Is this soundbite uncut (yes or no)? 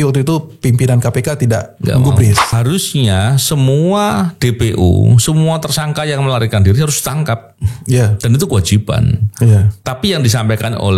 no